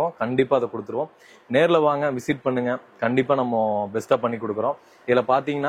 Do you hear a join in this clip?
no; 0 cuts

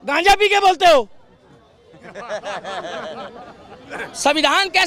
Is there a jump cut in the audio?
no; 0 cuts

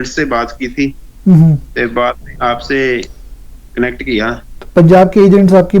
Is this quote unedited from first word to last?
no; 1 cut; at 4.5 s

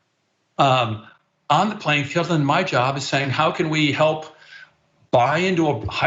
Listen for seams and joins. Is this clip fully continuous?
yes; 0 cuts

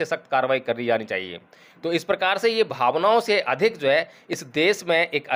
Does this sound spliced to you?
no; 0 cuts

